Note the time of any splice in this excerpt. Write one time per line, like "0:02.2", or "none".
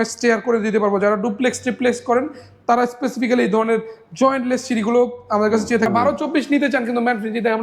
0:05.9

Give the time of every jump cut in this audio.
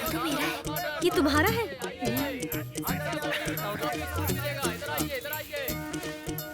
none

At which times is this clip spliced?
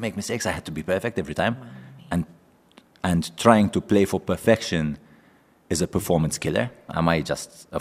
0:06.9

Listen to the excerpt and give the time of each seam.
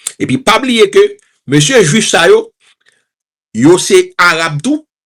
none

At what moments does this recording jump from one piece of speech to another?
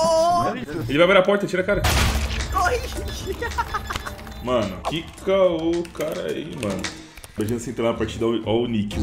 0:04.8
0:07.4

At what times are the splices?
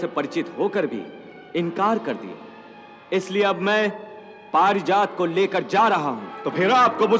none

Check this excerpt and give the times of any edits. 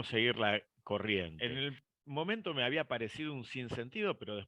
0:01.4

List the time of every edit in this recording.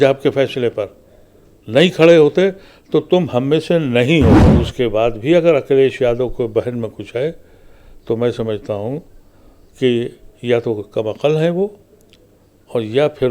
0:04.5

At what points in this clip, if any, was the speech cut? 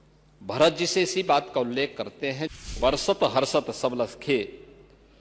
0:02.7

